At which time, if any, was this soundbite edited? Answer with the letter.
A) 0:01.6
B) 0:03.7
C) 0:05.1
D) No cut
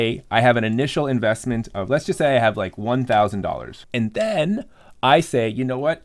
B